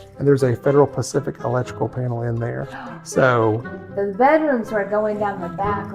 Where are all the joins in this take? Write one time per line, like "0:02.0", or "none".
0:03.7